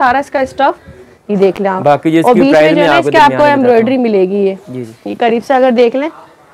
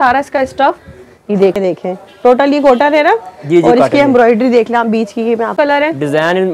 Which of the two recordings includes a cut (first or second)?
second